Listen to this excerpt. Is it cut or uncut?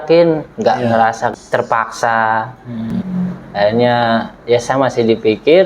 cut